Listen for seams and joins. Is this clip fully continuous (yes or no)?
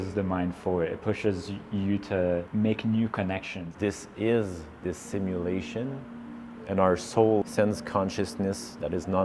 no